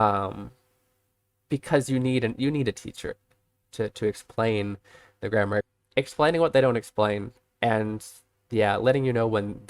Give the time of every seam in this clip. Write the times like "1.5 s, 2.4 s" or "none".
5.7 s

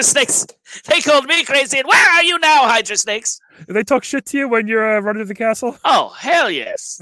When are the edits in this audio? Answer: none

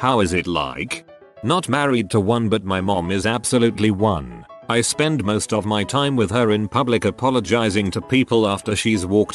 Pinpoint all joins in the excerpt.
1.3 s

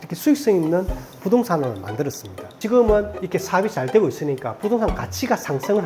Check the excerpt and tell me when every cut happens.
2.5 s

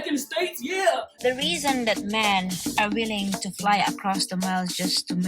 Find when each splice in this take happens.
1.1 s

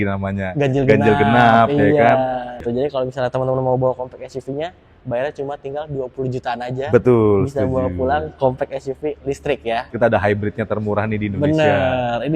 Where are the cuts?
2.7 s, 9.9 s

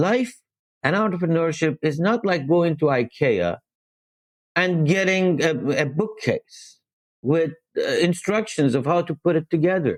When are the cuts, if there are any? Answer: none

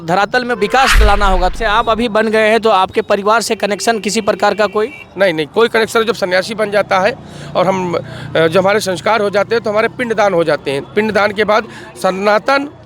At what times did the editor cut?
1.5 s

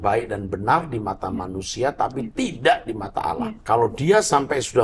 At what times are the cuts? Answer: 3.6 s

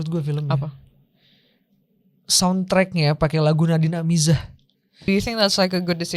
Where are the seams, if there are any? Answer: 5.0 s

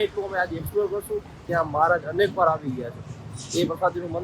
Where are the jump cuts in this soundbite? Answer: 1.4 s

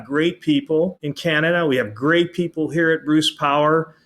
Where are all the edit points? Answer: 1.1 s

